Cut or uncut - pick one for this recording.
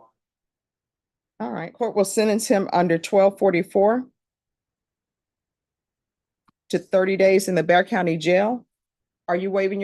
uncut